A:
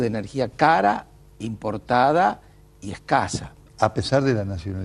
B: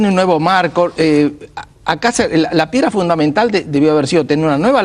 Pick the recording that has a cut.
A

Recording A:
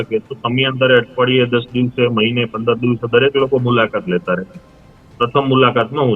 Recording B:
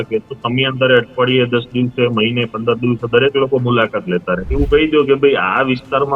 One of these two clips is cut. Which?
B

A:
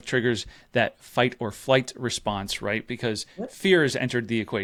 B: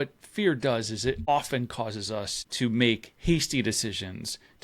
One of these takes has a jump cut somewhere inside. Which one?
B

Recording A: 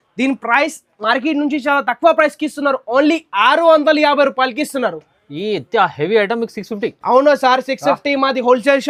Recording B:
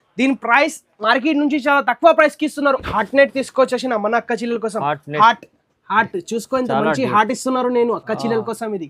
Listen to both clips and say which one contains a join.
B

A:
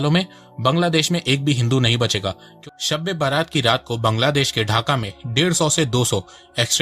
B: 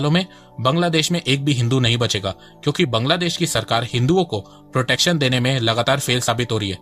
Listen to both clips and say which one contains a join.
A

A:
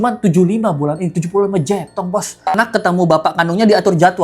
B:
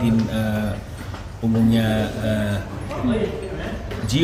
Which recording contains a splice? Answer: A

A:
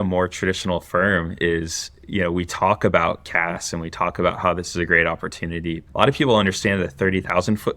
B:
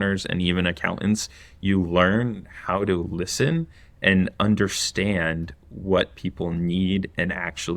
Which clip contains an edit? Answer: A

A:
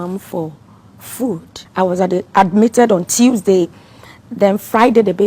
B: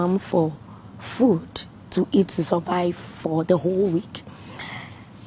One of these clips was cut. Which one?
A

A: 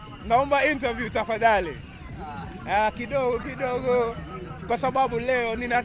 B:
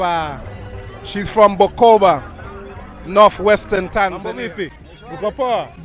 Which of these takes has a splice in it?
B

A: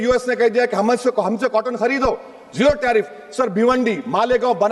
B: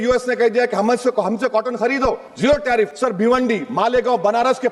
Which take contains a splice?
B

